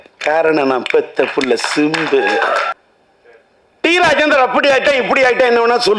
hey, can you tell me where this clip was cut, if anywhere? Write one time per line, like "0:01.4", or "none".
0:02.7